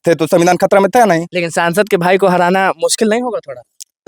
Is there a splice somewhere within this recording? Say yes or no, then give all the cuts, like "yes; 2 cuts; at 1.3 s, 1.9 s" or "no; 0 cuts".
no; 0 cuts